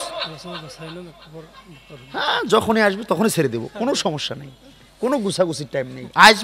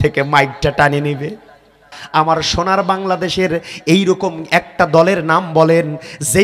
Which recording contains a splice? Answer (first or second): second